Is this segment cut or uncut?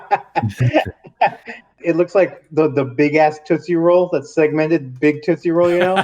cut